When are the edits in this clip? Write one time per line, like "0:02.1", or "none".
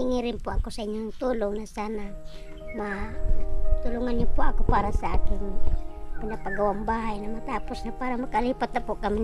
none